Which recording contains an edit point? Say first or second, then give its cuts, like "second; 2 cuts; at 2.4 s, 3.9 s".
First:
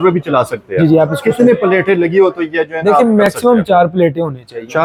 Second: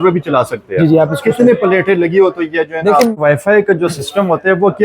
second; 1 cut; at 3.2 s